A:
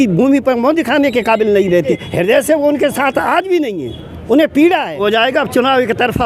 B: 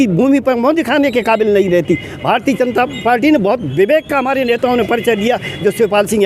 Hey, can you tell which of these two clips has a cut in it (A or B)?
A